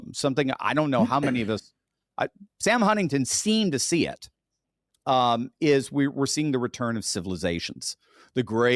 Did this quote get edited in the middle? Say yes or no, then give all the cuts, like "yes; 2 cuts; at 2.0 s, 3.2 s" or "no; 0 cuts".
no; 0 cuts